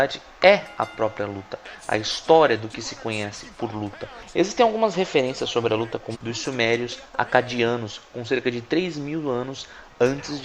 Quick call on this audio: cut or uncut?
uncut